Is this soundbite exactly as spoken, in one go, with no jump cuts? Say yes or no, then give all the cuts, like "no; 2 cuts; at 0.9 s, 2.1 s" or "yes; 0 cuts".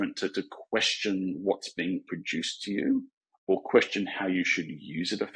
yes; 0 cuts